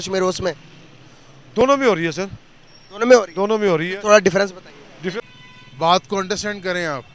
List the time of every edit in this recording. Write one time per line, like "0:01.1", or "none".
0:05.2

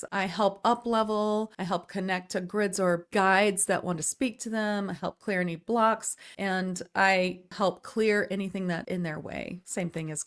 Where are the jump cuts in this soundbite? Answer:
0:01.6
0:08.8

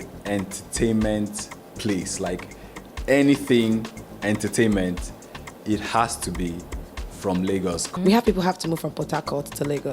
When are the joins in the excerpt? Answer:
0:07.9

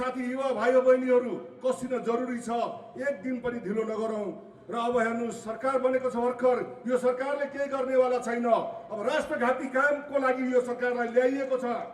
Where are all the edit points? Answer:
none

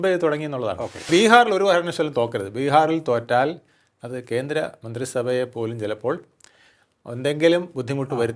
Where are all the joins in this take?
0:01.1

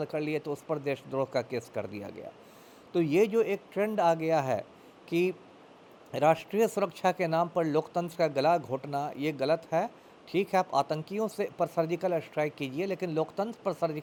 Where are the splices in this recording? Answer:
none

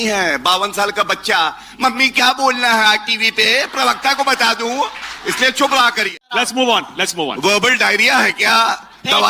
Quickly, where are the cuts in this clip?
0:05.0
0:06.3

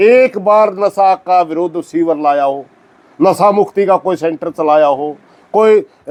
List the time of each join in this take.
none

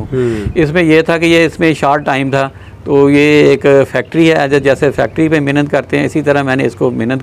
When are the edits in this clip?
none

